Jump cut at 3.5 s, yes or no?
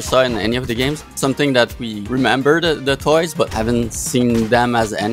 yes